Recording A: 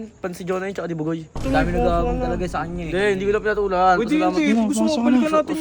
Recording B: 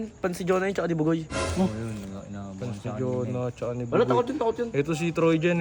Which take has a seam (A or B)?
A